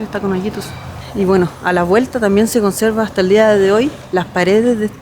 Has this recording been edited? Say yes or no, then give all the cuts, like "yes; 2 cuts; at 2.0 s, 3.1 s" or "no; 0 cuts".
yes; 2 cuts; at 1.1 s, 4.0 s